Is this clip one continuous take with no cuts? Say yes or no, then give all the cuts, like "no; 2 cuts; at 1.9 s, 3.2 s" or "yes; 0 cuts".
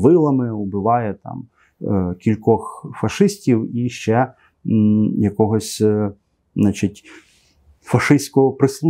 yes; 0 cuts